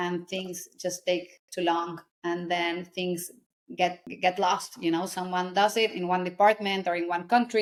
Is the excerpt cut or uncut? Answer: uncut